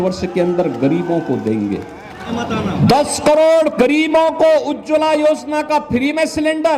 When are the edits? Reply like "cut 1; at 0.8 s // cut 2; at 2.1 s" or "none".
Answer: cut 1; at 2.3 s